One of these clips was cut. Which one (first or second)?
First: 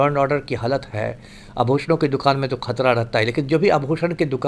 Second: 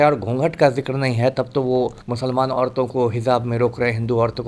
second